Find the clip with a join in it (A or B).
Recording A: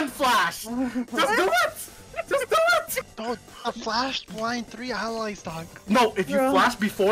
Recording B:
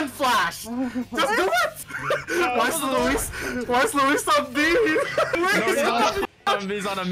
B